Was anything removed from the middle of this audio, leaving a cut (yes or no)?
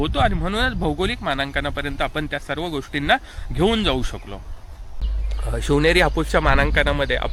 no